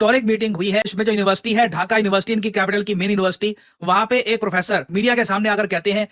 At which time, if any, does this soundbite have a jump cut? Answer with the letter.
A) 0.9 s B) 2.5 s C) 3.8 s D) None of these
A